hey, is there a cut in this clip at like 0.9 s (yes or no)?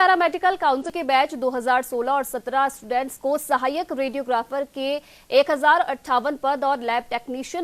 yes